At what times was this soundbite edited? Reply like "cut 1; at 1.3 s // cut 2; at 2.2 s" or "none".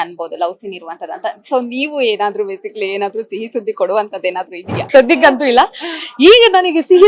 cut 1; at 4.7 s